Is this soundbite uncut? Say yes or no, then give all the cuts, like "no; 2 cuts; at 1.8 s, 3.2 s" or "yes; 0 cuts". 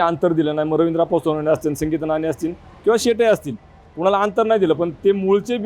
yes; 0 cuts